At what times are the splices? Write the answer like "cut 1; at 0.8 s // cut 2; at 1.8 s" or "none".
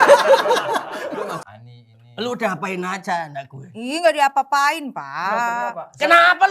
cut 1; at 1.5 s